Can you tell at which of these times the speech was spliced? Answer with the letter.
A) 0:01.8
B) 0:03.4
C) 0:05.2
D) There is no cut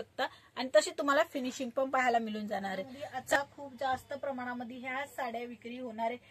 B